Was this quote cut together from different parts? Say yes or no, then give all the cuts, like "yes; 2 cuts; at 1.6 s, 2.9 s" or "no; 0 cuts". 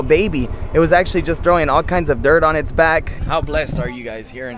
yes; 1 cut; at 3.2 s